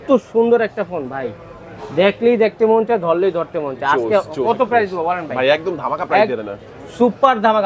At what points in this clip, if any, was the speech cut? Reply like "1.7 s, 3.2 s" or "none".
none